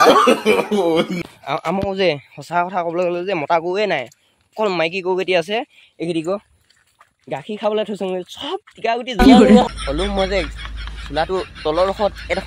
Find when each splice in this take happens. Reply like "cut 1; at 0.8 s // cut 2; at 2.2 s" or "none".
cut 1; at 1.1 s // cut 2; at 9.7 s